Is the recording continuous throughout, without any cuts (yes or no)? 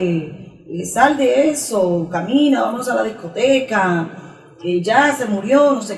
yes